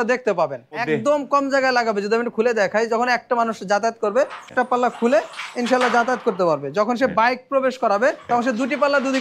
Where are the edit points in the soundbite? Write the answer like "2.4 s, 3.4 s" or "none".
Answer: 0.8 s, 4.5 s, 8.2 s